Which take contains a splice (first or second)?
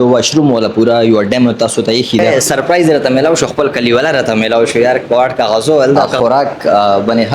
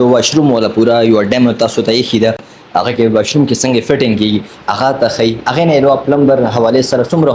first